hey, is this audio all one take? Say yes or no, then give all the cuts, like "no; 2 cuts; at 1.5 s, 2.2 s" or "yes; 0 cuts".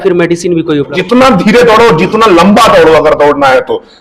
no; 1 cut; at 0.9 s